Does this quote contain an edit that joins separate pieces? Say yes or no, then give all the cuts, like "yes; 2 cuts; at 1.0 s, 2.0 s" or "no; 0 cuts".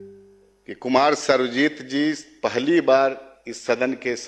no; 0 cuts